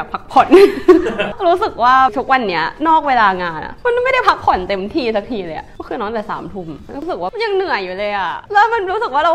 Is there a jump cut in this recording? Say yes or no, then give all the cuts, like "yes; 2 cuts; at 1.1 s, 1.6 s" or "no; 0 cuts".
no; 0 cuts